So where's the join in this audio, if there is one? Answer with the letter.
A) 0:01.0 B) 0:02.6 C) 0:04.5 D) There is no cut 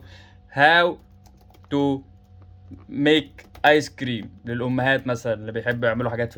D